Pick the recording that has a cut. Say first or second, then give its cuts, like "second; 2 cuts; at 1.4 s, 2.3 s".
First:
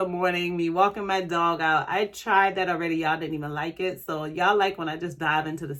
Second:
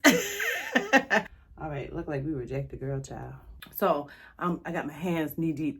second; 2 cuts; at 1.4 s, 3.5 s